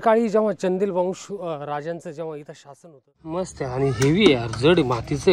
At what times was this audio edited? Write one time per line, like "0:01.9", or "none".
0:03.4